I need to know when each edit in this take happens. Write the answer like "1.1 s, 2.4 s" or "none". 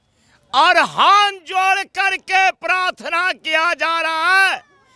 none